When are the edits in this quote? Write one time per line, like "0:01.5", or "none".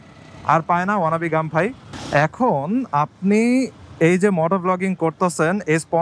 0:01.9